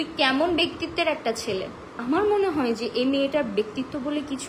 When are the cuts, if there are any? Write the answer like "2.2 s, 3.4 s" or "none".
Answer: 1.9 s